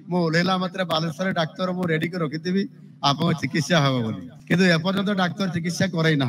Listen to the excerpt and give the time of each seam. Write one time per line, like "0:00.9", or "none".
0:04.3